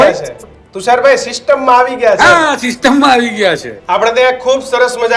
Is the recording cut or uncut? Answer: cut